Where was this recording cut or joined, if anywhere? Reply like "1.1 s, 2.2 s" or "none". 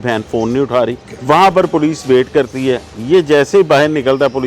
1.1 s